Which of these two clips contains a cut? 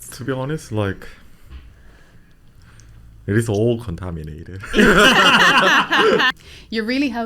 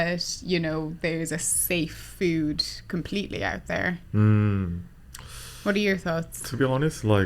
first; 1 cut; at 6.3 s

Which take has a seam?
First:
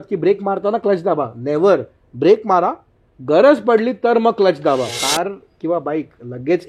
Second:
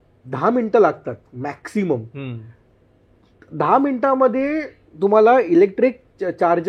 first; 1 cut; at 5.0 s

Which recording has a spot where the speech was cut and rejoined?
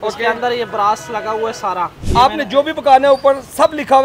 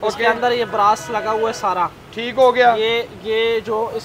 first; 1 cut; at 2.0 s

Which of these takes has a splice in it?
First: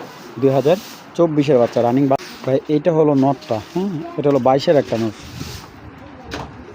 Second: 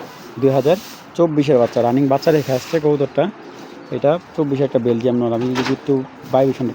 first; 1 cut; at 2.2 s

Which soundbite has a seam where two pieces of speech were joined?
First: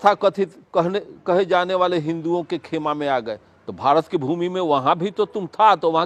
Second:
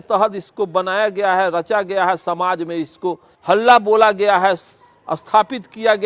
second; 1 cut; at 3.3 s

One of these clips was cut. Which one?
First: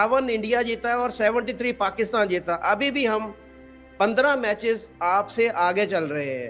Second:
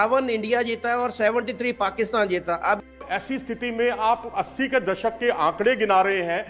second; 1 cut; at 2.8 s

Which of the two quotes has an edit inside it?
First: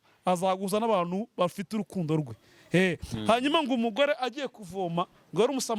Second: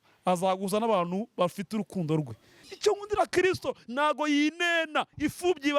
second; 1 cut; at 2.6 s

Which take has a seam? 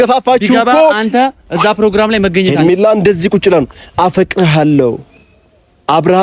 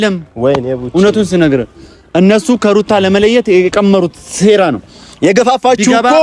first; 1 cut; at 2.5 s

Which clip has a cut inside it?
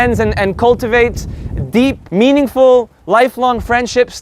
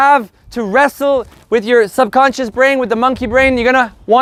first; 2 cuts; at 2.0 s, 3.0 s

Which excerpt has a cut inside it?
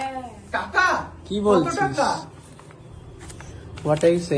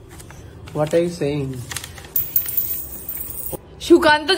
second; 1 cut; at 3.5 s

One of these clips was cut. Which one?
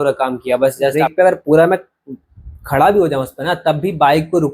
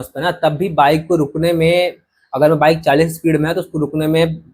first; 1 cut; at 1.0 s

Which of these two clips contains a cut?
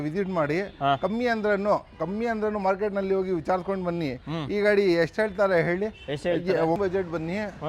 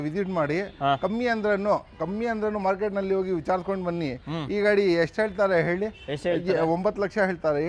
first; 1 cut; at 6.8 s

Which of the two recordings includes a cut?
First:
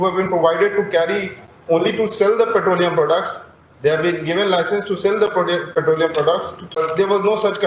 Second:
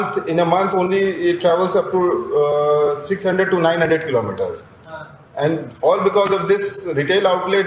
first; 1 cut; at 6.8 s

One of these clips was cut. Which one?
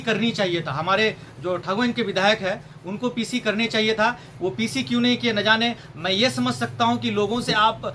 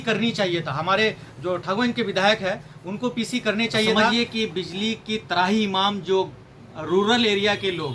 second; 1 cut; at 4.0 s

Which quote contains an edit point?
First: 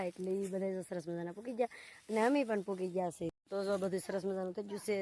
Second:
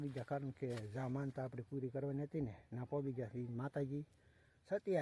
first; 1 cut; at 3.4 s

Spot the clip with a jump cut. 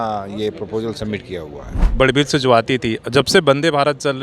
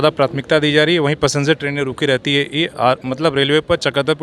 first; 1 cut; at 1.9 s

